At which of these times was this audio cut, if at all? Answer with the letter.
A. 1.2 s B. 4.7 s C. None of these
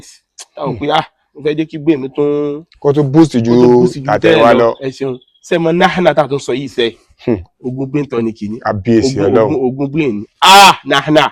C